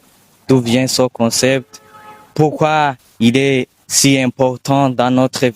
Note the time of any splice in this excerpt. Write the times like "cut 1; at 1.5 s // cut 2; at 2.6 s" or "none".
cut 1; at 3.1 s